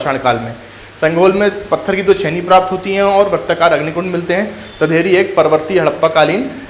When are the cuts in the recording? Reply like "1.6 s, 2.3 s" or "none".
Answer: none